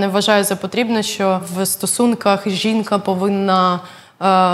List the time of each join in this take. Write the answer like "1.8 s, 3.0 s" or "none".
1.5 s